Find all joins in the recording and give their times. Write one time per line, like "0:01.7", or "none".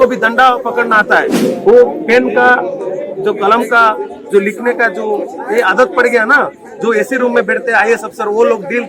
none